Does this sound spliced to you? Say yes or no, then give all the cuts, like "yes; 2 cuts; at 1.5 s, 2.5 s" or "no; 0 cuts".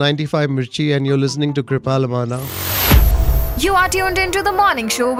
no; 0 cuts